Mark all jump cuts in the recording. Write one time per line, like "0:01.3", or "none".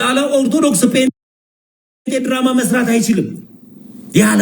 none